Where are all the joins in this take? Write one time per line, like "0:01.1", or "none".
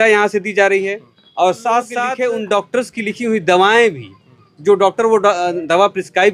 0:02.1